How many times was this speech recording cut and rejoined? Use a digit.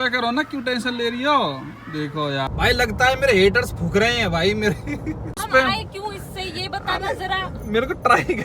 2